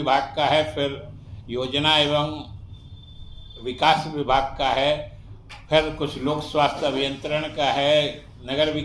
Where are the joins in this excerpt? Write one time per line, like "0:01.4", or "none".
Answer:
none